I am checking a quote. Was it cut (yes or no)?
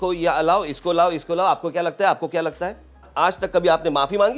yes